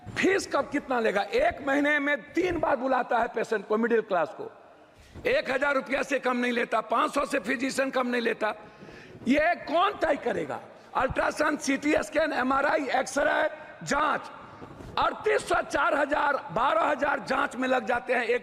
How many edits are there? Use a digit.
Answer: 0